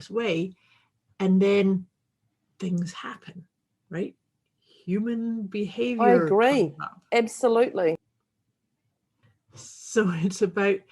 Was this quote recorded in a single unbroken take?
no; 1 cut; at 9.3 s

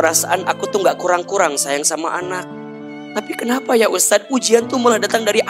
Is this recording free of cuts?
no; 1 cut; at 2.9 s

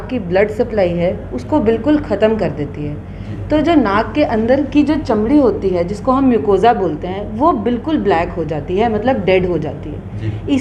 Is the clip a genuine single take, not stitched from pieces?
yes; 0 cuts

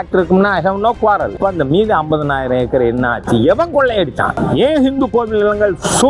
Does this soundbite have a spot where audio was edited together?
yes; 2 cuts; at 1.4 s, 4.4 s

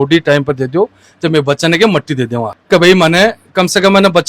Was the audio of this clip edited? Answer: no; 0 cuts

